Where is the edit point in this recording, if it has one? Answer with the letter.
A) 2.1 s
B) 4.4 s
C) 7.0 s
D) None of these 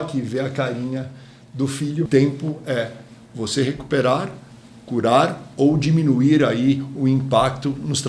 A